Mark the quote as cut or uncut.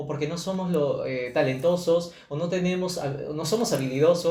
uncut